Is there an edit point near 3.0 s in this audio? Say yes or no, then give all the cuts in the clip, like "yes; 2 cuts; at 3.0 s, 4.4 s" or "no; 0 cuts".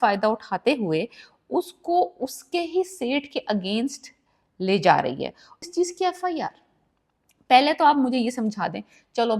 no; 1 cut; at 5.5 s